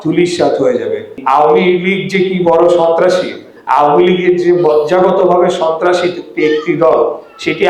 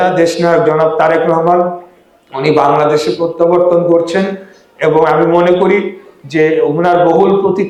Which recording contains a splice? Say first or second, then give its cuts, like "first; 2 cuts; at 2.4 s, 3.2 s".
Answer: first; 1 cut; at 1.2 s